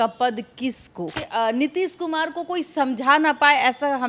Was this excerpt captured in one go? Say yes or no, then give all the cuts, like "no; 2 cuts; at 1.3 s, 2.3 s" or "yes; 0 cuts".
no; 1 cut; at 1.2 s